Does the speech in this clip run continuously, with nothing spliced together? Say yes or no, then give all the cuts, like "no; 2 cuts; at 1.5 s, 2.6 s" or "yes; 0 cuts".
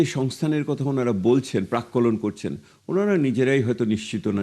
yes; 0 cuts